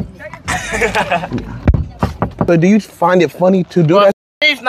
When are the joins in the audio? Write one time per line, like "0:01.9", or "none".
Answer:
0:02.4